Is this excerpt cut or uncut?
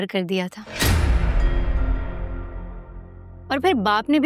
uncut